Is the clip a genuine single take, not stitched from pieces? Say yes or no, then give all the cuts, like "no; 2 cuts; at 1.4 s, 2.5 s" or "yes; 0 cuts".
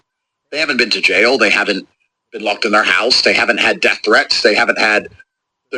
yes; 0 cuts